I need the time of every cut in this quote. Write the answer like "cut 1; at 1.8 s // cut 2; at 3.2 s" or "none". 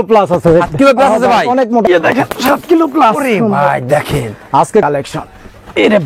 cut 1; at 1.9 s // cut 2; at 4.8 s